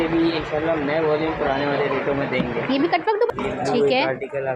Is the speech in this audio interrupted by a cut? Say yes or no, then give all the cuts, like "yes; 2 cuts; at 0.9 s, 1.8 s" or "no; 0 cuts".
yes; 1 cut; at 3.3 s